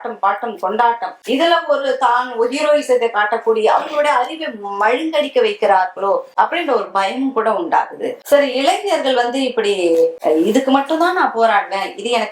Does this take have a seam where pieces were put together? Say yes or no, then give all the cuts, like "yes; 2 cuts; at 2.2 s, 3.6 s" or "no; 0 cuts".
no; 0 cuts